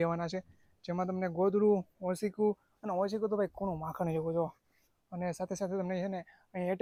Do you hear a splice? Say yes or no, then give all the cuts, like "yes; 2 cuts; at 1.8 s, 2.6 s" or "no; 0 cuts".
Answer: no; 0 cuts